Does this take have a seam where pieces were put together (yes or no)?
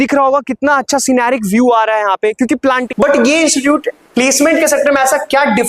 yes